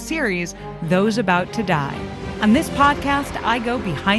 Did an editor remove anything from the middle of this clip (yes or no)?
yes